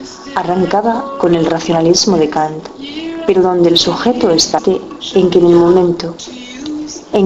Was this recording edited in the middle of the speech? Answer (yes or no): no